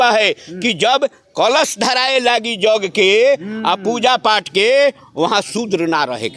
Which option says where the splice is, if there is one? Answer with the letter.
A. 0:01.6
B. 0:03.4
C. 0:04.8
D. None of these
D